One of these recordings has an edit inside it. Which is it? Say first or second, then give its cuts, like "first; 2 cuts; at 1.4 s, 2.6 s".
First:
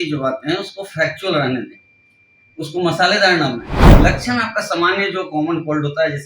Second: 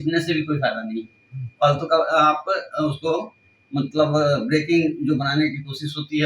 first; 1 cut; at 3.9 s